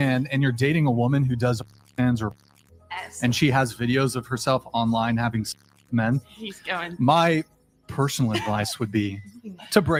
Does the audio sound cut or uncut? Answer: uncut